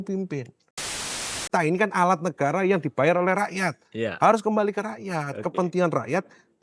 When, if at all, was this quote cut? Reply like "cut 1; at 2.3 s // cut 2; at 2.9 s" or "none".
cut 1; at 1.0 s

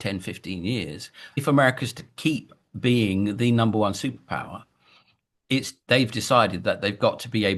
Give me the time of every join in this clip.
cut 1; at 1.3 s

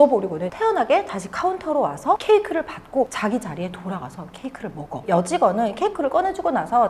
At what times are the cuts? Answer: none

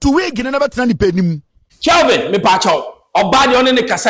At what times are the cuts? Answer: cut 1; at 1.8 s

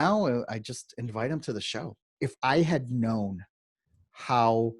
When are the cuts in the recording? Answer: cut 1; at 2.0 s

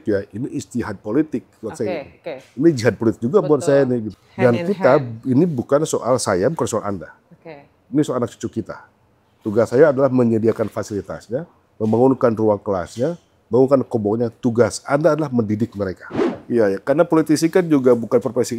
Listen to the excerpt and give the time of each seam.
cut 1; at 4.1 s // cut 2; at 16.3 s

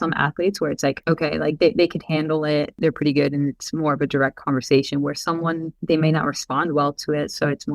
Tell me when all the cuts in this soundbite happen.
cut 1; at 1.0 s // cut 2; at 2.7 s // cut 3; at 5.7 s

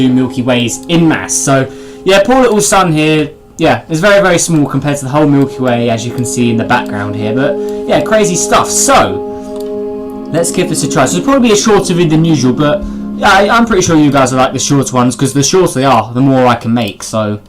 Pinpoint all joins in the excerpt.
cut 1; at 6.2 s

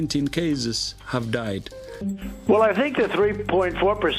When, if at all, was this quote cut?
cut 1; at 1.9 s

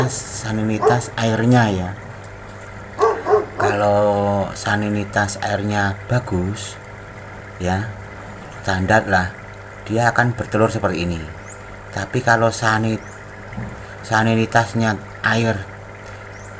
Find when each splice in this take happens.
cut 1; at 2.8 s // cut 2; at 3.7 s

